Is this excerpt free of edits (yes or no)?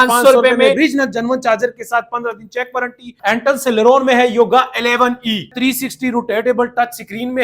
no